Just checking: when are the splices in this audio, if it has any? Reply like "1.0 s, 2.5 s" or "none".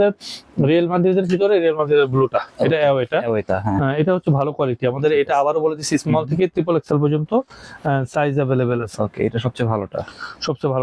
none